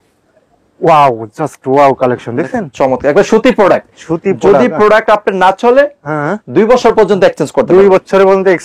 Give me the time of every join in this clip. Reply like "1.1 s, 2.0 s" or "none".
none